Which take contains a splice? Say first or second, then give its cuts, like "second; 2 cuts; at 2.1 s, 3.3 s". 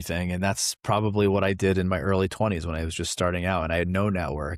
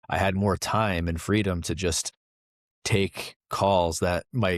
second; 1 cut; at 2.5 s